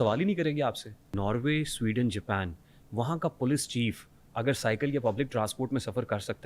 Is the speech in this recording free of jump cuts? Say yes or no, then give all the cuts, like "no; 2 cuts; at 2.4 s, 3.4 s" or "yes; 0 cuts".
no; 1 cut; at 1.2 s